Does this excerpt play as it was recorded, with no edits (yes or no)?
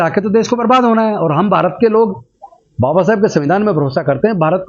yes